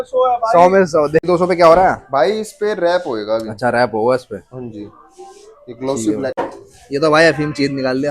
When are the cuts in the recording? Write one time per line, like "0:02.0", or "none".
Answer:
0:01.2
0:06.4